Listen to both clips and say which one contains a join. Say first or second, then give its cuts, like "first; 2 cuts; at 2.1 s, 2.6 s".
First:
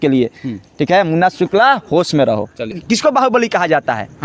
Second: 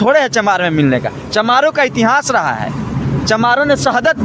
first; 1 cut; at 2.8 s